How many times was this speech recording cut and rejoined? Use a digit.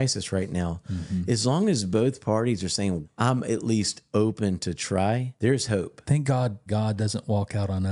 2